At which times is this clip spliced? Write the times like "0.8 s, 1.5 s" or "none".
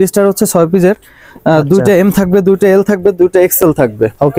none

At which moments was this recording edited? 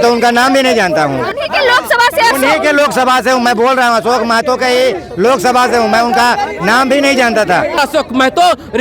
1.3 s, 7.8 s

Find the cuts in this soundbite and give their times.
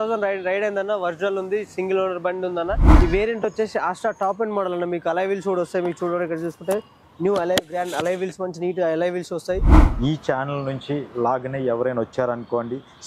2.9 s, 9.8 s

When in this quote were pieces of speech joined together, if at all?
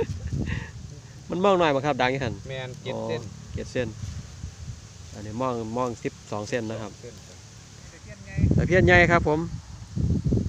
7.9 s

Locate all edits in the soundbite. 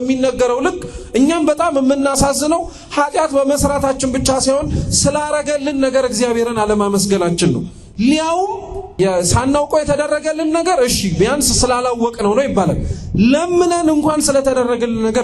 8.9 s

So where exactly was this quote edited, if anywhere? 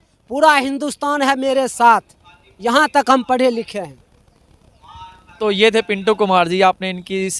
none

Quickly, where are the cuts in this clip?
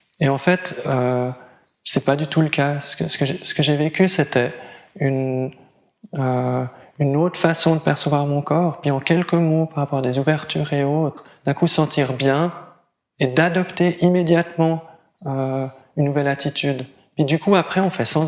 none

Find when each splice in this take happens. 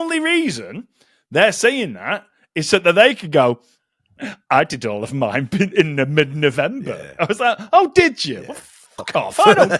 none

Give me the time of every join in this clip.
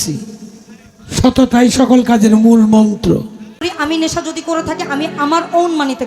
3.7 s

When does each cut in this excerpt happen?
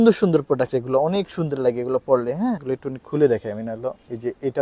2.6 s

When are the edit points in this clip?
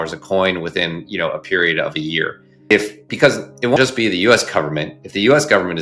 none

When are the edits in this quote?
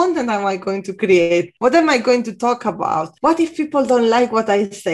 1.5 s, 3.1 s

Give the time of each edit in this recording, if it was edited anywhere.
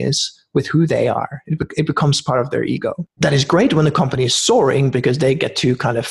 3.0 s

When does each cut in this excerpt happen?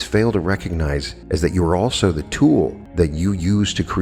1.1 s, 2.8 s

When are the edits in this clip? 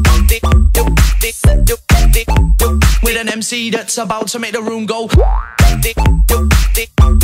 1.4 s

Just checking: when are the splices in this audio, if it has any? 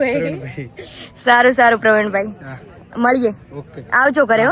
none

